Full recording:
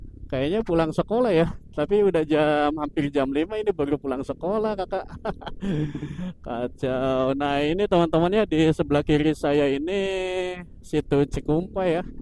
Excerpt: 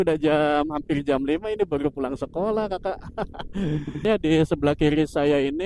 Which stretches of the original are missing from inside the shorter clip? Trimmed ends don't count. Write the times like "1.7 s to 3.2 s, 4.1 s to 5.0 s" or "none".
6.1 s to 8.3 s